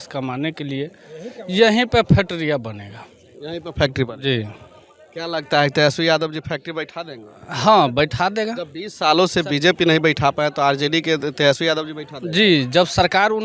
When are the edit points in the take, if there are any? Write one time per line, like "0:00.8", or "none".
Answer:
none